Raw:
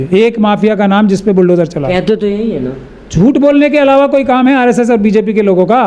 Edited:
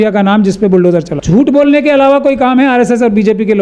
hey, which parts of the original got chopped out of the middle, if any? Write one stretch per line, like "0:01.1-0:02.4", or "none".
0:01.8-0:03.0